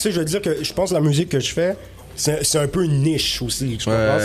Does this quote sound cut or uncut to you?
uncut